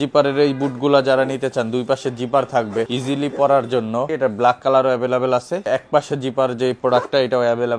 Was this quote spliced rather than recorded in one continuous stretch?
yes; 3 cuts; at 2.9 s, 4.1 s, 5.6 s

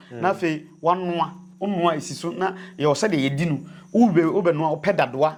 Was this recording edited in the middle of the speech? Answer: no; 0 cuts

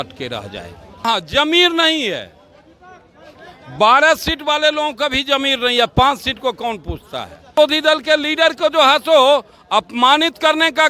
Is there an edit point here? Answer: yes; 2 cuts; at 1.1 s, 7.6 s

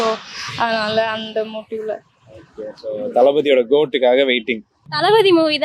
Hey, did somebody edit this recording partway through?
yes; 1 cut; at 4.8 s

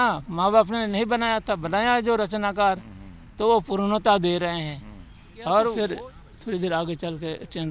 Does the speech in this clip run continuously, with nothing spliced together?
no; 1 cut; at 5.8 s

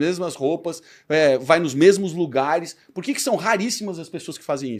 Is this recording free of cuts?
yes; 0 cuts

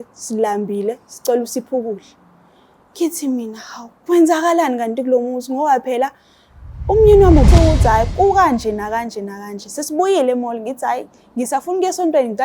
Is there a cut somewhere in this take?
yes; 1 cut; at 7.5 s

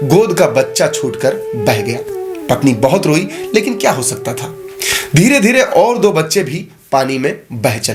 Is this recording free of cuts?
yes; 0 cuts

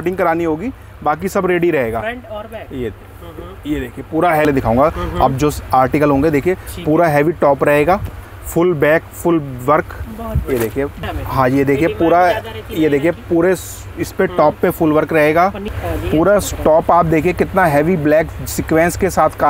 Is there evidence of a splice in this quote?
yes; 3 cuts; at 4.5 s, 11.0 s, 15.8 s

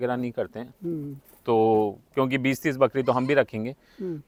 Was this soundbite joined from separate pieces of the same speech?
no; 0 cuts

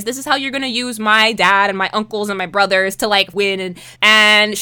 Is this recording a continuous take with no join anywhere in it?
no; 1 cut; at 3.6 s

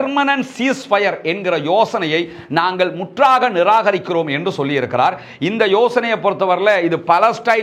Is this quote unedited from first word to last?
yes; 0 cuts

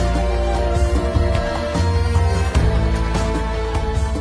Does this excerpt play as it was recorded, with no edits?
yes; 0 cuts

